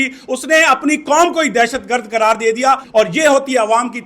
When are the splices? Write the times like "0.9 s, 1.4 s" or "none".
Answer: 2.8 s